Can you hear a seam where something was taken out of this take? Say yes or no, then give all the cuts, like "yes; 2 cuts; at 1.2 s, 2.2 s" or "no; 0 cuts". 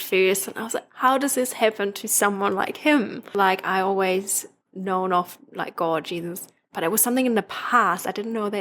yes; 1 cut; at 3.3 s